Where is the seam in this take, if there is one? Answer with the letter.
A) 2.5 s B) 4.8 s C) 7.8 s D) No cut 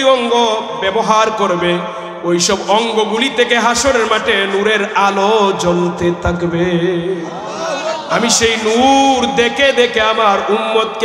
D